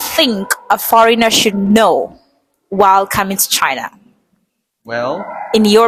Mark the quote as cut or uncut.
uncut